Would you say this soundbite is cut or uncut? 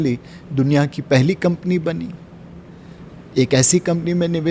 uncut